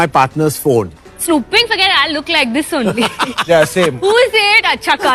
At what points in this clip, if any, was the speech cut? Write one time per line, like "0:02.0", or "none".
none